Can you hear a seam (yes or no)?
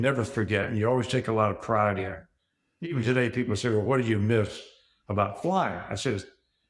no